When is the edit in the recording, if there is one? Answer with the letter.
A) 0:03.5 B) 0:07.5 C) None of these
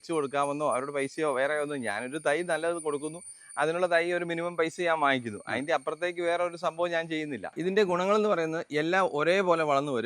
B